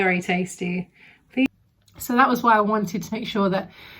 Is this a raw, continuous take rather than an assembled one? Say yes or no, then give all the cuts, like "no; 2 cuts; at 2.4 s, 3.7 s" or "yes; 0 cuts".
no; 1 cut; at 1.5 s